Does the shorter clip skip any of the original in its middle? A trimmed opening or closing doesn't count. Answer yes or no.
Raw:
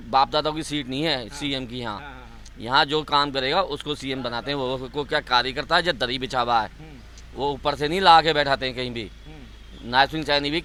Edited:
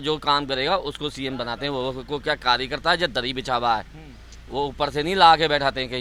no